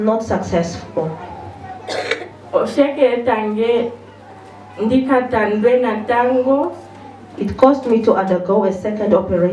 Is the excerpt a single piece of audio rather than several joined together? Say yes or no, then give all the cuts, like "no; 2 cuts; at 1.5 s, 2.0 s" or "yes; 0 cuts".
yes; 0 cuts